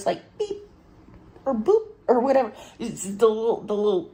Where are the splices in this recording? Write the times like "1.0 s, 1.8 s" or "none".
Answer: none